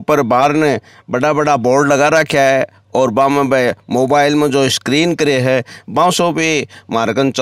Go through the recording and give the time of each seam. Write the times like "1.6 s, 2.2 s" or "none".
none